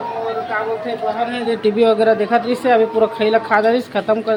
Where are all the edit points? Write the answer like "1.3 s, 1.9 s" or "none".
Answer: none